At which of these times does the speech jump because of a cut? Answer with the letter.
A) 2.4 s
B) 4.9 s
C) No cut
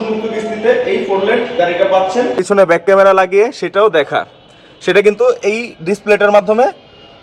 A